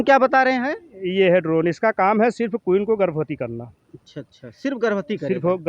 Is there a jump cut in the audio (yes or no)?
no